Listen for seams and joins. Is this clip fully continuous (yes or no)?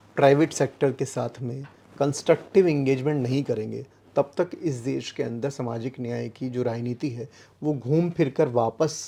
yes